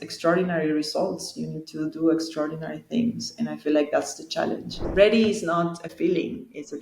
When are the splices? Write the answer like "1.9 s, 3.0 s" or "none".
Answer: 4.7 s